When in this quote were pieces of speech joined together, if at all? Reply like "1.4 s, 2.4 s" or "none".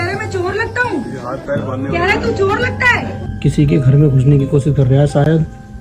3.3 s